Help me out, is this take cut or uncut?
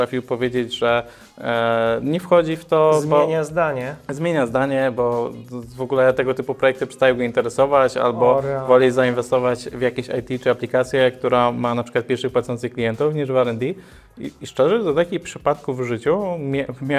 uncut